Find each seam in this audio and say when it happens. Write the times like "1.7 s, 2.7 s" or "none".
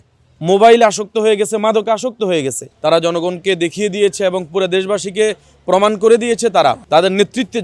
2.7 s, 6.8 s